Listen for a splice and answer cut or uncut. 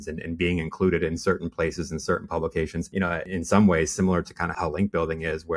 cut